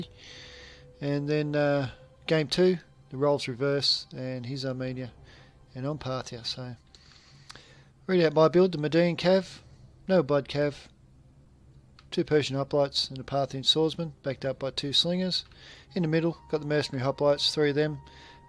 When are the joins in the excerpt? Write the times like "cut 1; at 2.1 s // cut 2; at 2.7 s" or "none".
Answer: none